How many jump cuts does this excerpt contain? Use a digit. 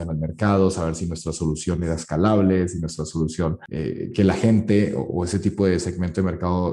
1